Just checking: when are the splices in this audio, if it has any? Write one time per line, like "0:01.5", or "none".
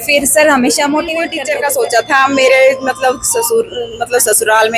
0:01.3